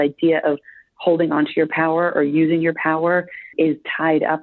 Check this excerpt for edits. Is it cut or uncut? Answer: cut